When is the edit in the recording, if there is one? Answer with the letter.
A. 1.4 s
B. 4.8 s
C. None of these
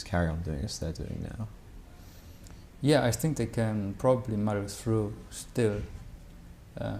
A